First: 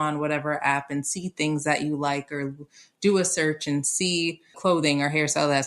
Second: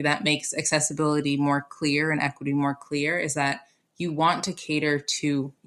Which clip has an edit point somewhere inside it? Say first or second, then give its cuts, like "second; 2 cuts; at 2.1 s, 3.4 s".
first; 1 cut; at 4.5 s